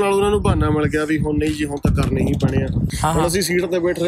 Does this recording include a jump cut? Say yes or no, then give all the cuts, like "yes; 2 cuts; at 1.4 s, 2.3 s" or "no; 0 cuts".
yes; 1 cut; at 2.9 s